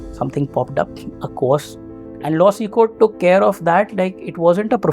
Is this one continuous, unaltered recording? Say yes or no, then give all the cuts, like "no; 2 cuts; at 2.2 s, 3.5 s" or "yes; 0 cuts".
no; 1 cut; at 2.0 s